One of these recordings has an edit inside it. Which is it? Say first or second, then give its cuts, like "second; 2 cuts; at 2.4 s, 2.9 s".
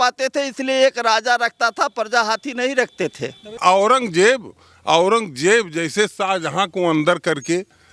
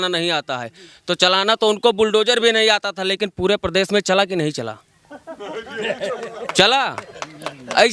first; 1 cut; at 3.6 s